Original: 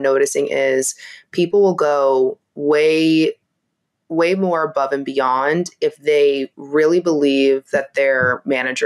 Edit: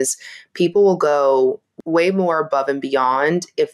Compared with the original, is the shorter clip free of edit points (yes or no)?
no